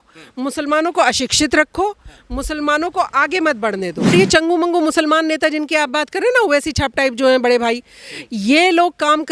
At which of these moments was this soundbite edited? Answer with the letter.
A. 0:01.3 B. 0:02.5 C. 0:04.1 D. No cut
C